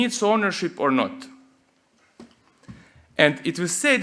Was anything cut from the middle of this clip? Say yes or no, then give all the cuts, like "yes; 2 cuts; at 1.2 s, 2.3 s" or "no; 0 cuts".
no; 0 cuts